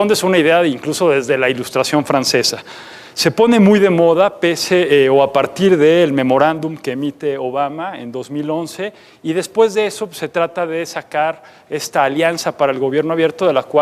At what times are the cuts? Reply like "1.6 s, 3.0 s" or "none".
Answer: 9.4 s